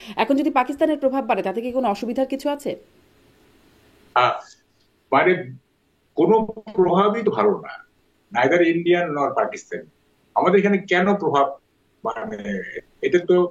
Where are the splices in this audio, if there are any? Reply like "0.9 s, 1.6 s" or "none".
none

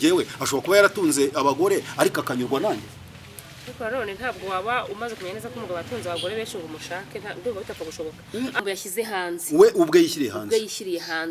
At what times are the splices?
8.6 s

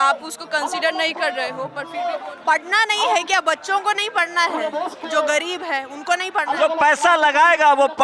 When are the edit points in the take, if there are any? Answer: 1.9 s

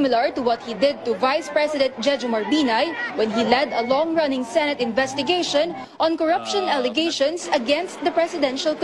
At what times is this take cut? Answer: none

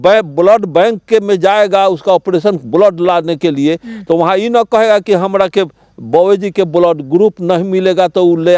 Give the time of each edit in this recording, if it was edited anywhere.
none

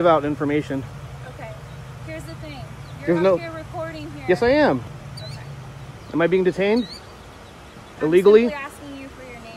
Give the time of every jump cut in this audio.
4.9 s

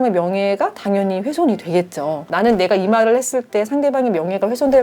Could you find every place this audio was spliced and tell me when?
2.3 s

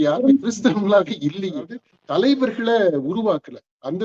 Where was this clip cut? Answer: 1.8 s

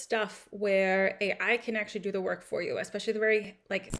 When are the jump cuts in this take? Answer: none

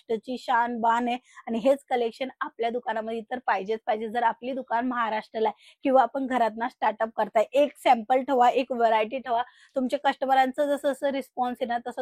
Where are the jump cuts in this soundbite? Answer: none

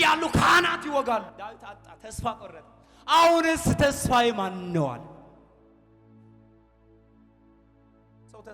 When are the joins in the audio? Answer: 1.3 s

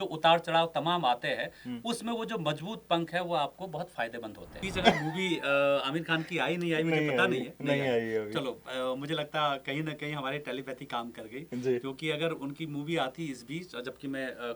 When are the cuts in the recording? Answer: 4.6 s

